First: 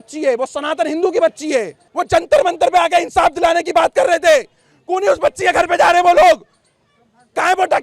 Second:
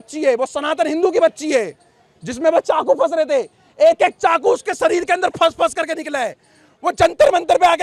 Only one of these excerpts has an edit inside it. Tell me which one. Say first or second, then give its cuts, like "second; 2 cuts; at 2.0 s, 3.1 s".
first; 1 cut; at 1.8 s